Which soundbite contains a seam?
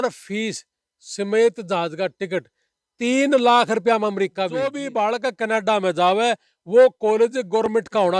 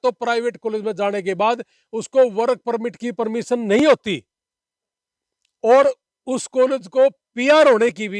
first; 1 cut; at 4.8 s

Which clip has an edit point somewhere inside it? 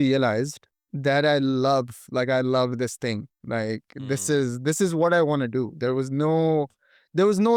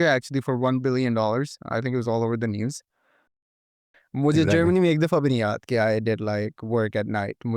second; 1 cut; at 3.4 s

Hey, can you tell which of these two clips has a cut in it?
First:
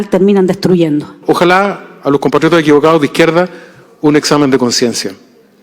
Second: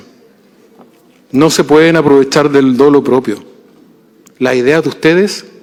first; 1 cut; at 1.1 s

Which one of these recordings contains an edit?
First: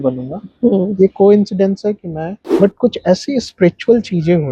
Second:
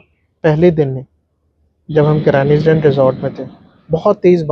first; 1 cut; at 2.3 s

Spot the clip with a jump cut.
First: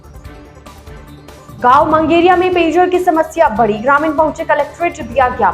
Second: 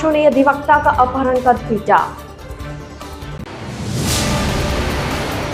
first; 1 cut; at 0.9 s

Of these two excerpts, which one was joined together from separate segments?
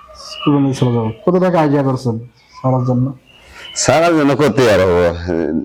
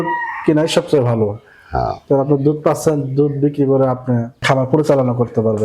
second; 1 cut; at 4.4 s

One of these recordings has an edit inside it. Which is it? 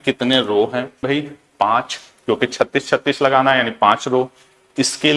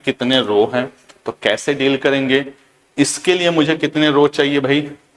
first; 1 cut; at 1.0 s

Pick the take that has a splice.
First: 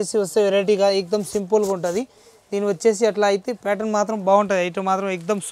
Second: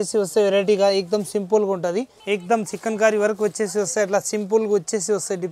second; 1 cut; at 2.2 s

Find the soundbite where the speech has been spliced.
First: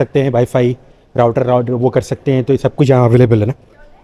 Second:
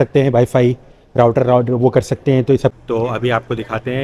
second; 1 cut; at 2.7 s

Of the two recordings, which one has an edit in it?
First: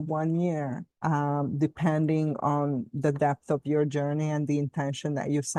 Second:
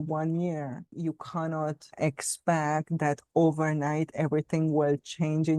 second; 2 cuts; at 0.9 s, 1.9 s

